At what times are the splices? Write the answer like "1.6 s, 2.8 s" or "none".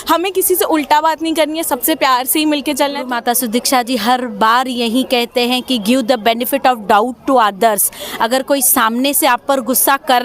3.1 s